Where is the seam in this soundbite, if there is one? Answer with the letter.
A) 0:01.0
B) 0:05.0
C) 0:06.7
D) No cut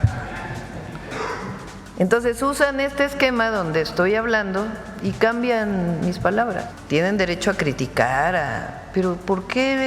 C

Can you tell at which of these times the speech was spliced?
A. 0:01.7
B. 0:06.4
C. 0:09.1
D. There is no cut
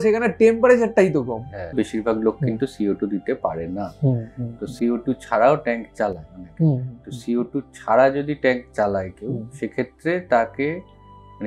A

